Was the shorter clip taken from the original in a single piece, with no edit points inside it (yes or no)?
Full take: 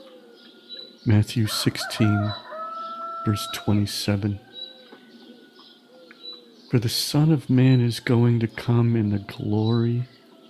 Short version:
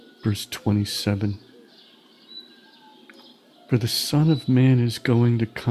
yes